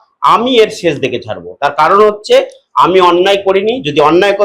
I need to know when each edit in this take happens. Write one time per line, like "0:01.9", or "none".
none

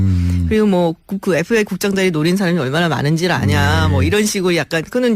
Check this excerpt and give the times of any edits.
0:02.2

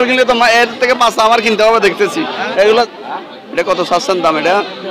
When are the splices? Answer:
0:02.9

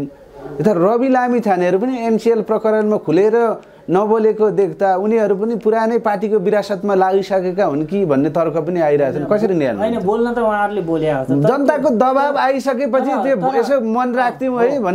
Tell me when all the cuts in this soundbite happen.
none

